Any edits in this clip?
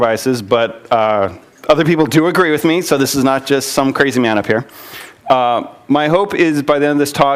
no; 0 cuts

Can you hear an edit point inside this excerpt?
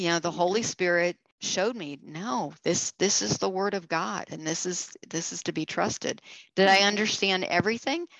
yes; 1 cut; at 1.3 s

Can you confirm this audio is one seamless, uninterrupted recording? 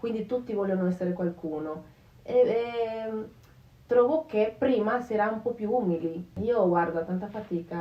no; 1 cut; at 6.3 s

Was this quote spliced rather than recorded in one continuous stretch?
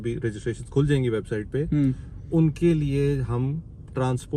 no; 0 cuts

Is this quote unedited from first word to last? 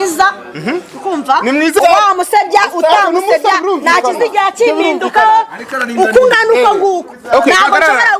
no; 1 cut; at 1.8 s

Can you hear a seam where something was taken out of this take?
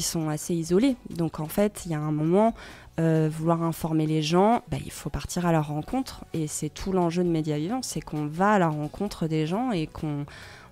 yes; 1 cut; at 4.7 s

